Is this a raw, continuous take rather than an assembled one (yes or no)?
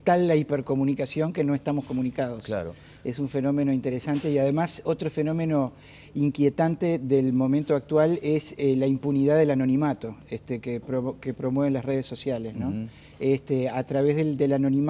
yes